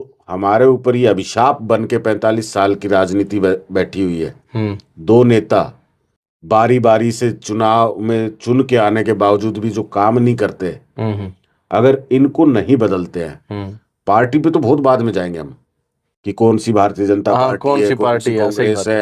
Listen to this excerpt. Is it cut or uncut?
uncut